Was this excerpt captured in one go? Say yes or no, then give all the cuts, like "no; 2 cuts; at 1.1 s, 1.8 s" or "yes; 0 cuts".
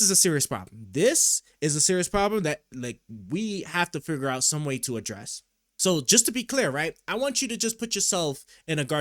no; 1 cut; at 5.7 s